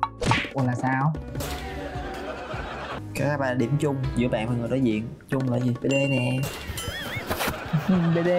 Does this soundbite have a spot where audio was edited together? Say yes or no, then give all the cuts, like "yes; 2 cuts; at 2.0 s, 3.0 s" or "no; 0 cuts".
yes; 1 cut; at 2.9 s